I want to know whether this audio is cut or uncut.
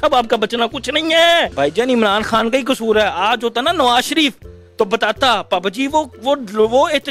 cut